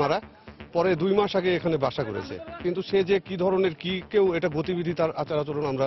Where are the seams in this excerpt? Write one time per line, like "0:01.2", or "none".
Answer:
none